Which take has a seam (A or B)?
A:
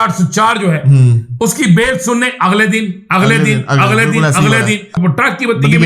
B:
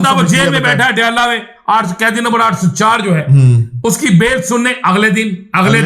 A